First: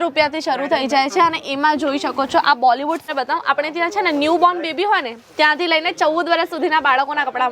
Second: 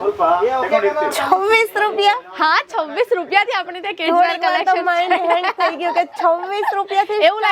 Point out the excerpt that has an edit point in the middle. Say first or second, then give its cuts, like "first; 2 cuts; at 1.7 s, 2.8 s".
first; 1 cut; at 3.0 s